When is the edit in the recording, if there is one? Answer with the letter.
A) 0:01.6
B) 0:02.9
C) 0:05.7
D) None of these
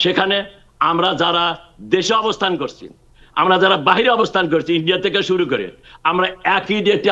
D